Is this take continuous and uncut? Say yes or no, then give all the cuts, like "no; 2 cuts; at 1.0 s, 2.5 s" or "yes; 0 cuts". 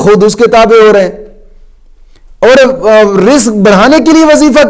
yes; 0 cuts